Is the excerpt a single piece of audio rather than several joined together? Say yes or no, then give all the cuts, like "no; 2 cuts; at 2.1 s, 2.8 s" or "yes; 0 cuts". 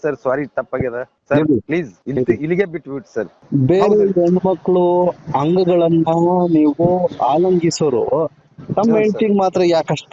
no; 3 cuts; at 1.1 s, 2.0 s, 3.4 s